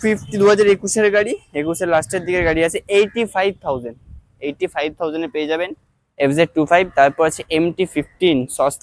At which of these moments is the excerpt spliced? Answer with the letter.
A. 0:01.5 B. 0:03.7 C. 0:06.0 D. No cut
D